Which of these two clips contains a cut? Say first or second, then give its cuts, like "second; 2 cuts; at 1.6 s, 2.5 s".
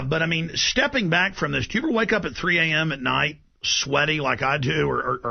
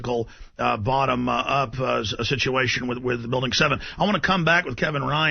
first; 1 cut; at 2.4 s